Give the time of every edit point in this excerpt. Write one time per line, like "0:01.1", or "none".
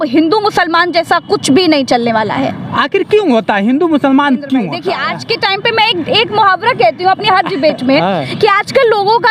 0:04.9

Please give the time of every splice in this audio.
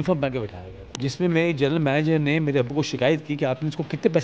0:00.9

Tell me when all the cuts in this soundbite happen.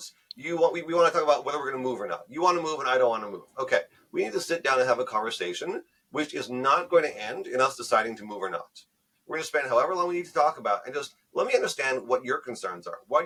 none

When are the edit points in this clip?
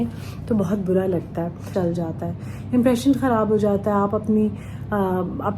0:01.7

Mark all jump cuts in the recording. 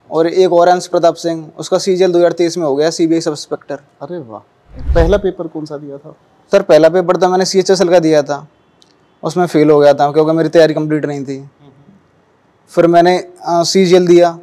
0:04.9

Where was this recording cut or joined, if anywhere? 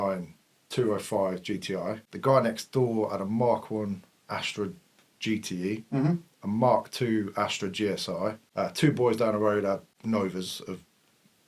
0:02.0
0:08.4
0:09.9

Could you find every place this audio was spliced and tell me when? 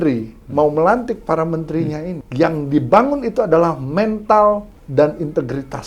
0:02.2
0:04.8

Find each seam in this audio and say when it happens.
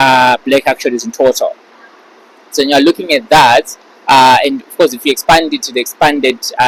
none

